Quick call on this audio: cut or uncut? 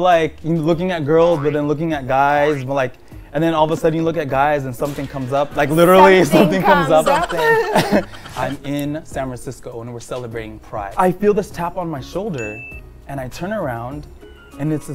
cut